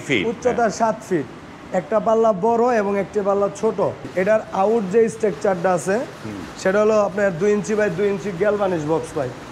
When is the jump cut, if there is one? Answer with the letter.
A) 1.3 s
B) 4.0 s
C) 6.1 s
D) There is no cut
B